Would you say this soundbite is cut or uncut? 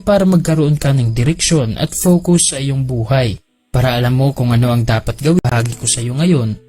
cut